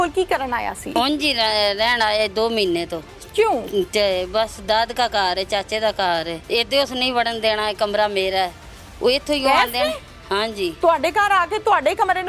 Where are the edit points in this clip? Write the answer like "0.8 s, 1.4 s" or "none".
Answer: 1.0 s, 6.4 s